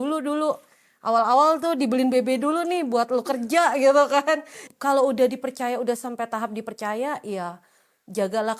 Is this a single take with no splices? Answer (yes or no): no